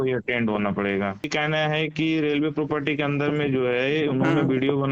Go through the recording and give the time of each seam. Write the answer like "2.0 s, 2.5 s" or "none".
1.2 s